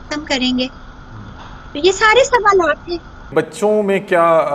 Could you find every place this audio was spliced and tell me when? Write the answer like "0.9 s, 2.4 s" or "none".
3.3 s